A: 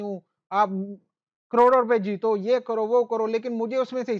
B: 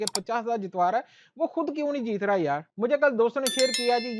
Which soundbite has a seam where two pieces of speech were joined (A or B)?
B